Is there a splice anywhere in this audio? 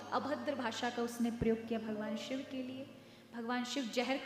no; 0 cuts

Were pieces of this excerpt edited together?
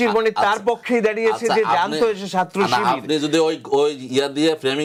no; 0 cuts

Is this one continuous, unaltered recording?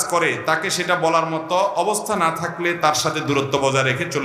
yes; 0 cuts

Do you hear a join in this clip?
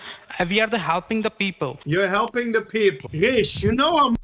yes; 2 cuts; at 1.8 s, 3.1 s

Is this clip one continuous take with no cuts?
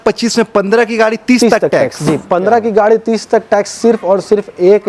yes; 0 cuts

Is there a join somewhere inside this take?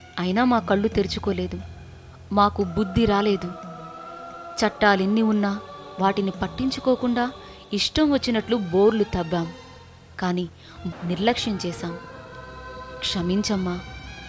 yes; 1 cut; at 10.8 s

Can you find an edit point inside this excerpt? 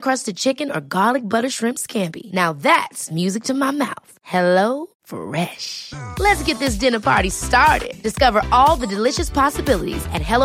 no; 0 cuts

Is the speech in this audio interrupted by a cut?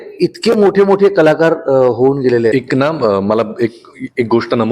yes; 1 cut; at 2.5 s

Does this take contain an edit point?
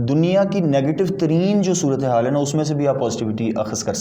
no; 0 cuts

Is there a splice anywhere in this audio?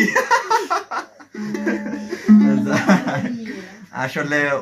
no; 0 cuts

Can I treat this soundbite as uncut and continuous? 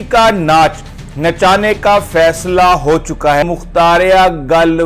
no; 1 cut; at 3.4 s

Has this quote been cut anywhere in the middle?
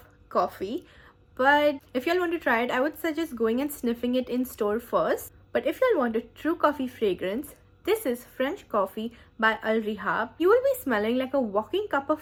no; 0 cuts

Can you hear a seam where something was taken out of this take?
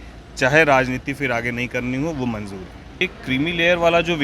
yes; 1 cut; at 3.0 s

